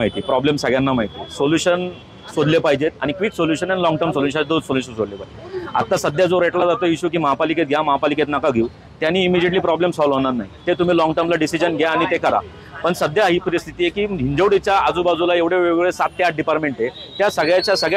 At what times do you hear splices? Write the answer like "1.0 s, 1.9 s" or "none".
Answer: none